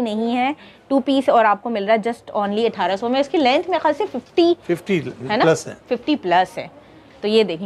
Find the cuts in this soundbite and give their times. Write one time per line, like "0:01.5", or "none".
none